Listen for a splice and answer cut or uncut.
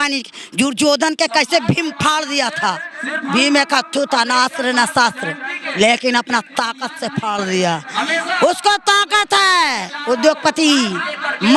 uncut